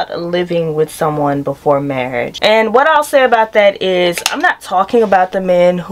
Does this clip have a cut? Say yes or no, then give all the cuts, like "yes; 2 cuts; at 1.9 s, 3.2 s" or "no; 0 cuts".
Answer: yes; 1 cut; at 2.3 s